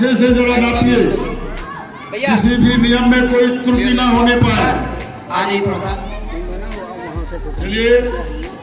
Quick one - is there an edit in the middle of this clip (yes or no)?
no